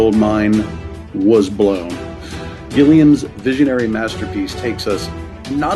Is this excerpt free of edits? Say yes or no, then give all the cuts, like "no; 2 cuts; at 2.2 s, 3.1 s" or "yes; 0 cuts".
no; 1 cut; at 4.8 s